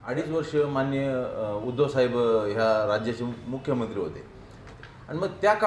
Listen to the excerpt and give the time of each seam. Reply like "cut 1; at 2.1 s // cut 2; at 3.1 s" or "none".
cut 1; at 4.6 s